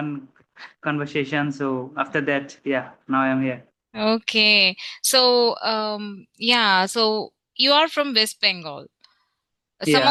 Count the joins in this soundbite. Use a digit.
0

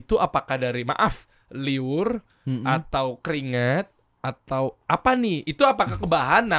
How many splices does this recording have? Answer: 0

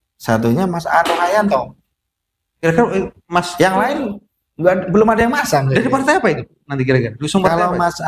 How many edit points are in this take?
0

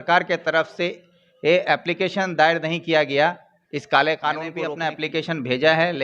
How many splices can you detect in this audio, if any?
1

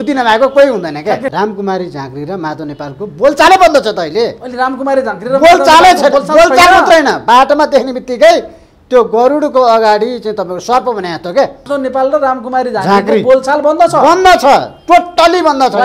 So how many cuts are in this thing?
2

